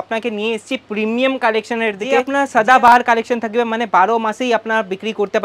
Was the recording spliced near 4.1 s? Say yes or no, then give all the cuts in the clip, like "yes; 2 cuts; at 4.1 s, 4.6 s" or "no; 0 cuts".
no; 1 cut; at 2.3 s